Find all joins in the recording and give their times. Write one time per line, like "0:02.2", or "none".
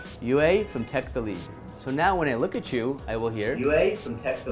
0:01.7

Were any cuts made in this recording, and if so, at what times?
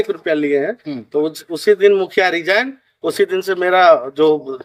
none

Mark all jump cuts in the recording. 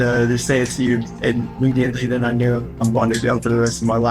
0:01.1
0:02.8

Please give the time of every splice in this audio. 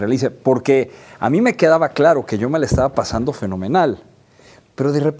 none

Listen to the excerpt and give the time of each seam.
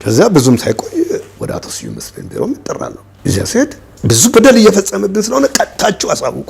0:03.9

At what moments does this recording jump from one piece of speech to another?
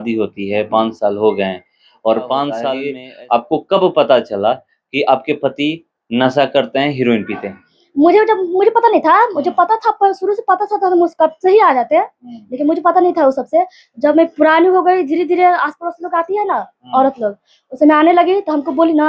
none

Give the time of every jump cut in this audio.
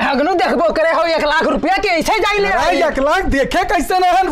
none

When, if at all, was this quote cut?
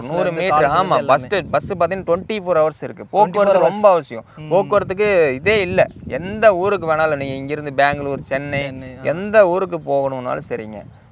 none

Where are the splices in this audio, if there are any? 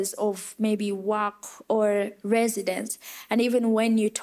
0:02.2

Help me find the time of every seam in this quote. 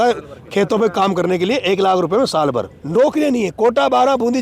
0:02.8

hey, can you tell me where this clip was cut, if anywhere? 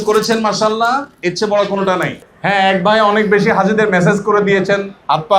0:02.2

